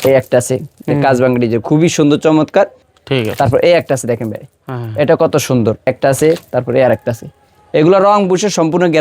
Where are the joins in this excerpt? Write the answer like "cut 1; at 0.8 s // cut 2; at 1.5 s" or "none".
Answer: cut 1; at 2.9 s // cut 2; at 5.9 s